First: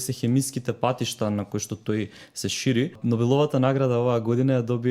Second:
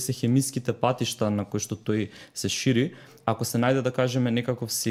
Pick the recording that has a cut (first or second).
first